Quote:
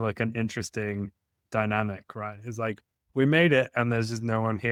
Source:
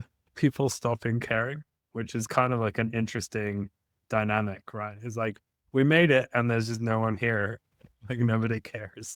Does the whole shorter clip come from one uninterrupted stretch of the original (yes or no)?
yes